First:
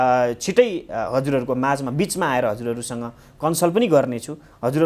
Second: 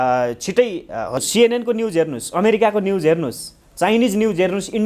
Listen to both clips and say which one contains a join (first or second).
second